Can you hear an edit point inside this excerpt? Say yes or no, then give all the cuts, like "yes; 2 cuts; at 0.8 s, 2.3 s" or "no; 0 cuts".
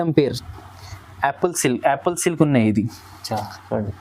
no; 0 cuts